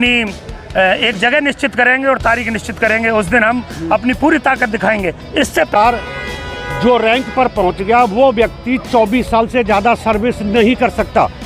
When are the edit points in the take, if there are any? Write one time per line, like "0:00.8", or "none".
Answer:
0:05.7